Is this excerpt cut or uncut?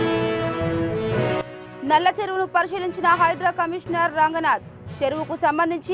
cut